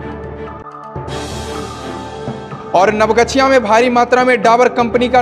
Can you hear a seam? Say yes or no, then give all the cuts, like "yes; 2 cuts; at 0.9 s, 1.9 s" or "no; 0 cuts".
no; 0 cuts